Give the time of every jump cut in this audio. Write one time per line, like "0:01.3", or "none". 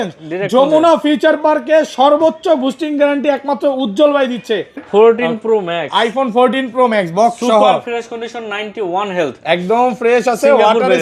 0:04.8